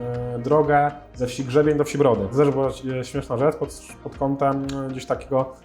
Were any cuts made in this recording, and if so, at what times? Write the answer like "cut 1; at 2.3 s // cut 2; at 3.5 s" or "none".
cut 1; at 2.3 s